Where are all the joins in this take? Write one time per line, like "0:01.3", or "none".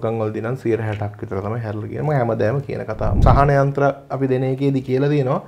0:03.2